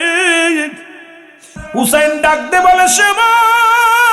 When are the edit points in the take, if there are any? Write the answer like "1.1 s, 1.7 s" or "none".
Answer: 1.6 s